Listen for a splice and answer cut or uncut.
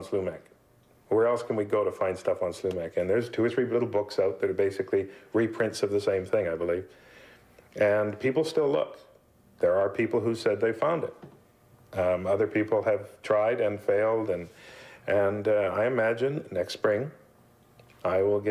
uncut